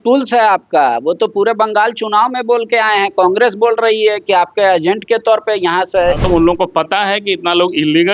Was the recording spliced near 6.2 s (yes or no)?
yes